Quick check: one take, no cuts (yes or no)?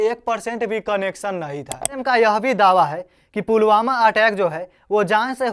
no